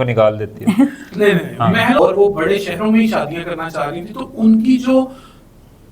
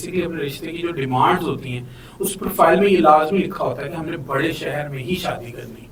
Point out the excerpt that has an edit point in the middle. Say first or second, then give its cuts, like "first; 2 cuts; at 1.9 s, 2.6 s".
first; 1 cut; at 2.0 s